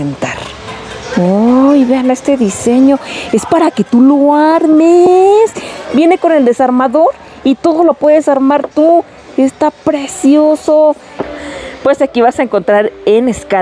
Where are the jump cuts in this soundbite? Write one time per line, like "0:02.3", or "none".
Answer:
0:11.2